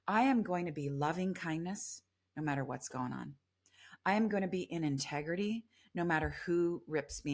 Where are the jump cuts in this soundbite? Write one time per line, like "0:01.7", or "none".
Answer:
none